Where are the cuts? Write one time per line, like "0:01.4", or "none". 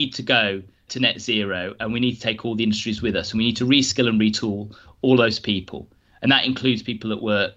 none